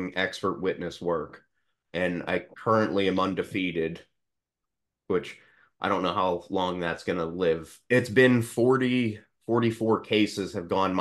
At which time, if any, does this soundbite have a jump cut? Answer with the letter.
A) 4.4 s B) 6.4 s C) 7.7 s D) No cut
C